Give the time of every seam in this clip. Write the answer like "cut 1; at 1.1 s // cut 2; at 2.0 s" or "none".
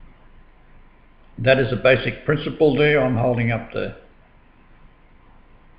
cut 1; at 2.1 s